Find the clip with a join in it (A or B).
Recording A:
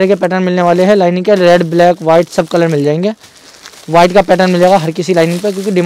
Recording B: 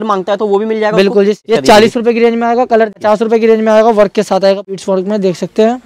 B